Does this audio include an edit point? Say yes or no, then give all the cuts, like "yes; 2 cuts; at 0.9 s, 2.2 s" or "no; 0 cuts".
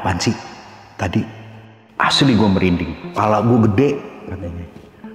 yes; 1 cut; at 3.0 s